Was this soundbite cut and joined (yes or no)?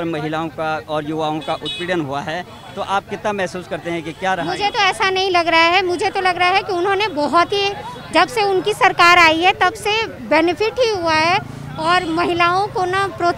no